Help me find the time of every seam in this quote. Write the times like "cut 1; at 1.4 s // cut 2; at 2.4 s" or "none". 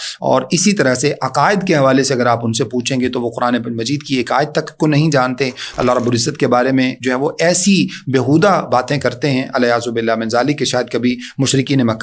none